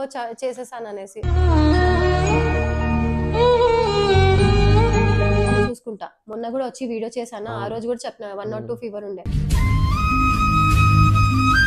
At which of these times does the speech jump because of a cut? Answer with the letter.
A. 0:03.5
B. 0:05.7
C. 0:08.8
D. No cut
B